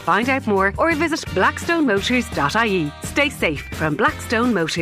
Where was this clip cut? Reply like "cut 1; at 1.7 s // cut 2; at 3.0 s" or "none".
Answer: none

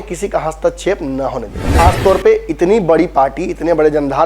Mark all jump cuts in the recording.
cut 1; at 1.6 s

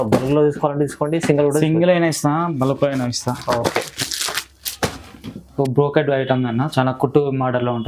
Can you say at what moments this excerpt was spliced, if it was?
cut 1; at 5.5 s

